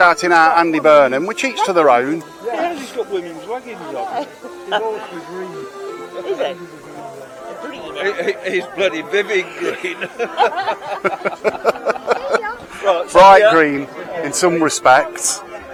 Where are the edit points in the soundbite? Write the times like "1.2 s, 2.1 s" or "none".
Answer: none